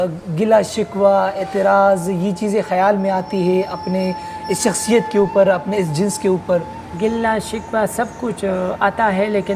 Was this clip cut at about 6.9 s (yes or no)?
yes